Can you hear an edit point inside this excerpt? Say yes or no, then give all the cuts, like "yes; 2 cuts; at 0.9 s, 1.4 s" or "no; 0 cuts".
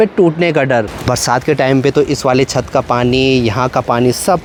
no; 0 cuts